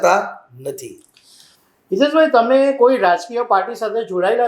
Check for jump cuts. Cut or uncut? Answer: uncut